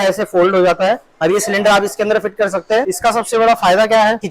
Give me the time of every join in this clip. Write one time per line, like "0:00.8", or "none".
0:01.1
0:02.9

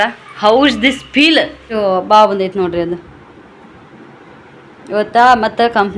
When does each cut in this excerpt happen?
0:01.6

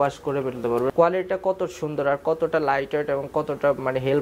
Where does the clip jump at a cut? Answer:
0:00.9

